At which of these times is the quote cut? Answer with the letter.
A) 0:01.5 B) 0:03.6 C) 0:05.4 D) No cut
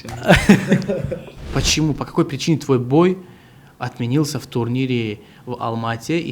A